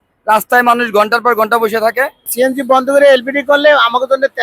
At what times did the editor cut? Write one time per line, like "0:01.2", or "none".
0:02.3